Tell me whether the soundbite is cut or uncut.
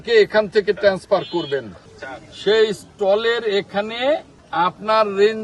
cut